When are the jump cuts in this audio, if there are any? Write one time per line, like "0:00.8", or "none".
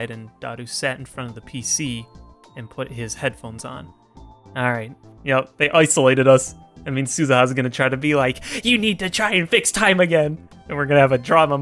none